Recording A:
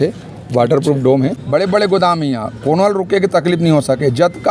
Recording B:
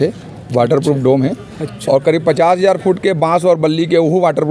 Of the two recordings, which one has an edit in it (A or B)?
A